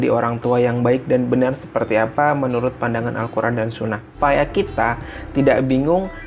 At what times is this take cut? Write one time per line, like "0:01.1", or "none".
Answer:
0:04.2